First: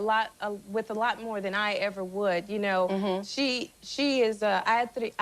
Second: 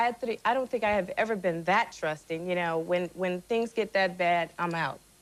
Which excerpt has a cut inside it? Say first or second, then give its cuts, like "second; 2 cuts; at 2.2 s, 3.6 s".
first; 1 cut; at 3.8 s